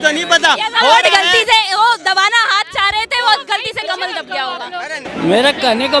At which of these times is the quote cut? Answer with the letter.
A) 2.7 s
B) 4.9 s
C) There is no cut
C